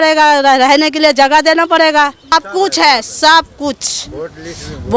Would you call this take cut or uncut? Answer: cut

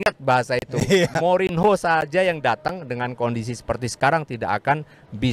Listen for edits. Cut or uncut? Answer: uncut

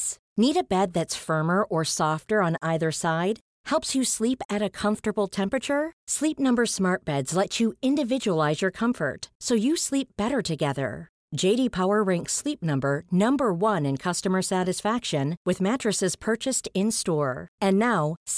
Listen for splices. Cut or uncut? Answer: uncut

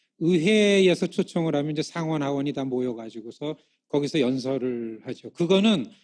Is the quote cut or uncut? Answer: uncut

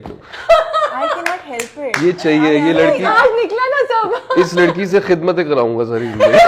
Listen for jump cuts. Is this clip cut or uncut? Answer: uncut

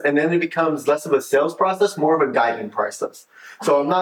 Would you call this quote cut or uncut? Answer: uncut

